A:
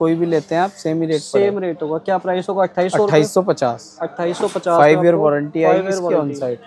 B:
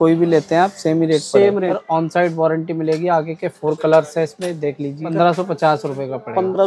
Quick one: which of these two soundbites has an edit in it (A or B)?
B